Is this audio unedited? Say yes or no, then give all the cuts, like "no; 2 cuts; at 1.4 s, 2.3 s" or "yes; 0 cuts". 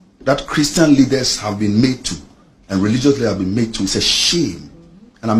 yes; 0 cuts